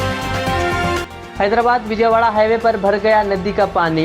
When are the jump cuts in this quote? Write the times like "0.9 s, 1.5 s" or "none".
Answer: none